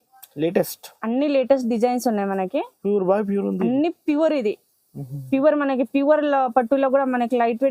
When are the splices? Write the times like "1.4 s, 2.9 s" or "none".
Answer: none